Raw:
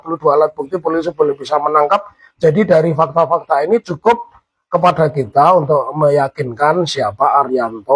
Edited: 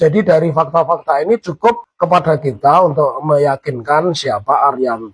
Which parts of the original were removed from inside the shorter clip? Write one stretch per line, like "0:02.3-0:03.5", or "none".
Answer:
0:04.3-0:04.6